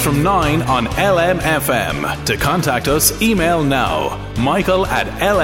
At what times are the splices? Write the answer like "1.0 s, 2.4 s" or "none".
none